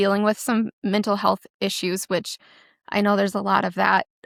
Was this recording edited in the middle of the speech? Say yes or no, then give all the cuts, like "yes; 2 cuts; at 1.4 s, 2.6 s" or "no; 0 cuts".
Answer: no; 0 cuts